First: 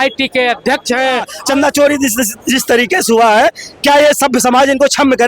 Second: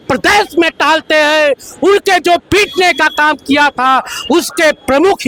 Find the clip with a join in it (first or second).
first